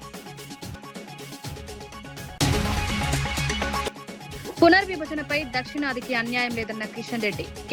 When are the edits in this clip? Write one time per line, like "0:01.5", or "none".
0:01.1